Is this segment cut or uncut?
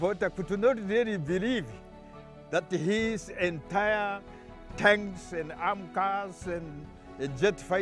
uncut